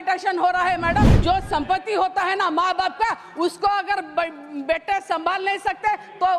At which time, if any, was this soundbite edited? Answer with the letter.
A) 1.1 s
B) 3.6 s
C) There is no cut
A